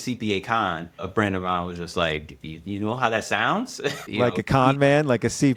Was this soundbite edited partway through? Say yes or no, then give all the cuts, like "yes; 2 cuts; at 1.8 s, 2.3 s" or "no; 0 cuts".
no; 0 cuts